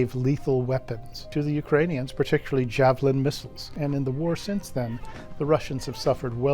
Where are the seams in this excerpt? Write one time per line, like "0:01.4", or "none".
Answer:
0:01.3
0:03.6